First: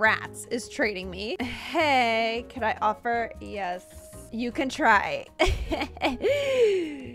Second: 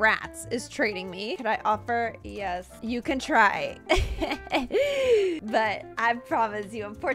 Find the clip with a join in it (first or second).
second